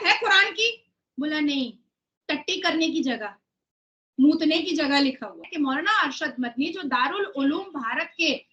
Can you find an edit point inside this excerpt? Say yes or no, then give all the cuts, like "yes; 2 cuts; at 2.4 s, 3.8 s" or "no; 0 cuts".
yes; 1 cut; at 5.5 s